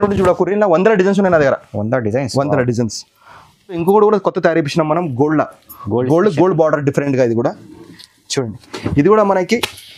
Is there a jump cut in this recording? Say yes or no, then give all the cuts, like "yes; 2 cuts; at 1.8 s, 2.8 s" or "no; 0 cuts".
yes; 1 cut; at 3.8 s